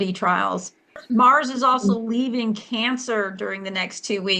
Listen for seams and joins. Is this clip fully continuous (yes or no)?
no